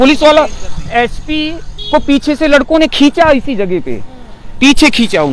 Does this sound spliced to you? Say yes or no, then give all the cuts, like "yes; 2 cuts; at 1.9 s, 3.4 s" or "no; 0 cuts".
no; 0 cuts